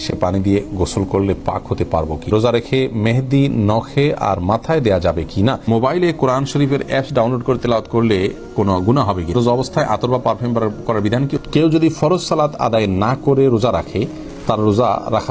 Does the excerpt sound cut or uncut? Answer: cut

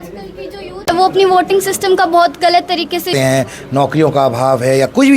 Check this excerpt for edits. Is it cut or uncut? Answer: cut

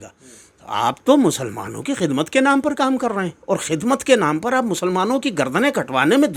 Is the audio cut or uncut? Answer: uncut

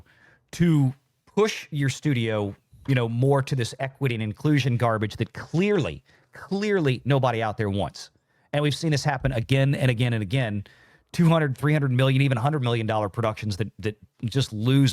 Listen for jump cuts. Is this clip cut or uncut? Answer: uncut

